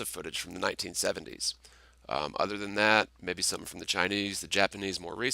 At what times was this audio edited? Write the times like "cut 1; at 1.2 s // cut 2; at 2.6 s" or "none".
cut 1; at 3.7 s